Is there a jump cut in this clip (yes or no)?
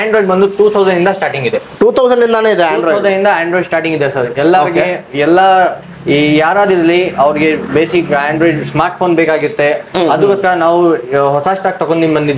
no